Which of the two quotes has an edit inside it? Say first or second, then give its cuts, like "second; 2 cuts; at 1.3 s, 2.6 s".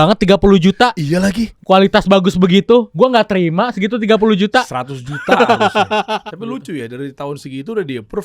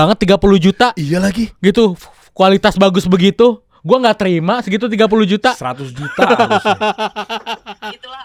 first; 3 cuts; at 1.5 s, 2.9 s, 6.3 s